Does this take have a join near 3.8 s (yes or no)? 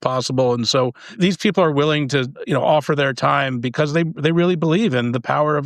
no